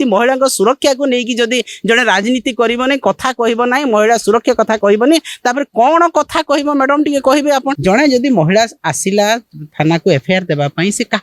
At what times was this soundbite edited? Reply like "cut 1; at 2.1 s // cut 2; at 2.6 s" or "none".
cut 1; at 7.8 s